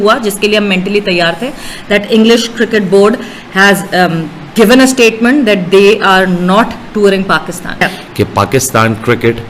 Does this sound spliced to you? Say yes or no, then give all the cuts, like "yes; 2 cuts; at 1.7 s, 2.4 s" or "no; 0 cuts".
yes; 1 cut; at 7.8 s